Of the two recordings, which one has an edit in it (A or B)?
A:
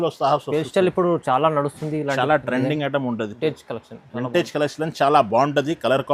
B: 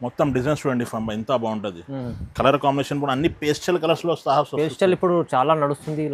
A